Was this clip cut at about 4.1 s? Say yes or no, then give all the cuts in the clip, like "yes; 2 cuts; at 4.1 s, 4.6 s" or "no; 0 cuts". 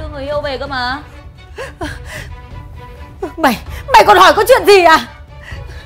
no; 1 cut; at 1.1 s